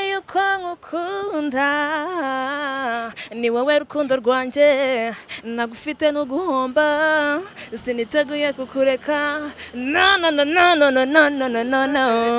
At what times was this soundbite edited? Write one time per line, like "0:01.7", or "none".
none